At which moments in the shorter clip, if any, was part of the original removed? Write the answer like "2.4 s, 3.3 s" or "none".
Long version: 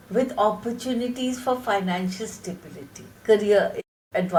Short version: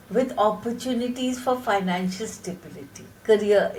none